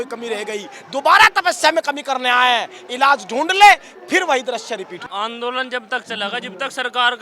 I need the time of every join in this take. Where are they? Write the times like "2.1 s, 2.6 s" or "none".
5.0 s